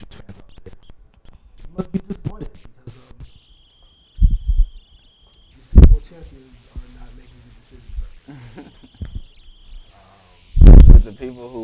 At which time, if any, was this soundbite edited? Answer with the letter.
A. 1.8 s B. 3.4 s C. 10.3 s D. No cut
A